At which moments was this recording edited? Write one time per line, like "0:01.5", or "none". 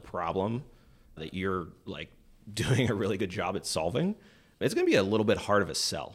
0:01.2
0:04.6